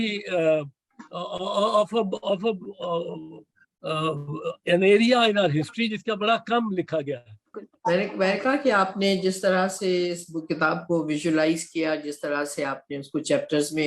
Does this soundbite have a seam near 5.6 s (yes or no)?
no